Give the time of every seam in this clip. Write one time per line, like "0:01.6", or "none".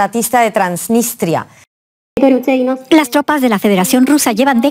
0:01.5